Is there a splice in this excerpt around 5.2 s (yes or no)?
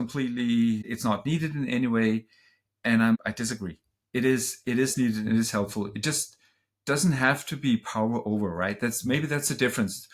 no